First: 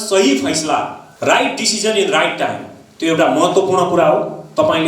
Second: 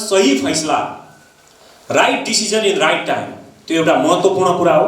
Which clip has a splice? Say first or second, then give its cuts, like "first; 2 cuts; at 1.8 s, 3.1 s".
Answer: first; 1 cut; at 1.0 s